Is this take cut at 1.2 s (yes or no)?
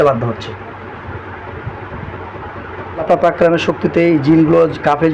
no